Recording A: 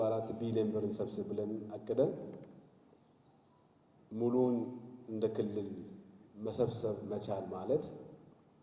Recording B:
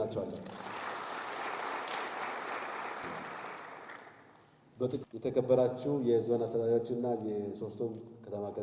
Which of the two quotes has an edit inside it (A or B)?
B